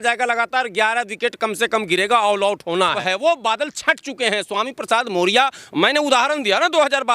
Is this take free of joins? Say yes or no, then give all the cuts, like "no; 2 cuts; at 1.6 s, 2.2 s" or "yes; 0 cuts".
no; 1 cut; at 3.0 s